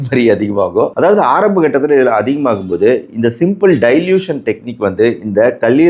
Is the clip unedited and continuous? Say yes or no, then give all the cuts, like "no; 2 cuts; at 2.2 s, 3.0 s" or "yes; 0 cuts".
yes; 0 cuts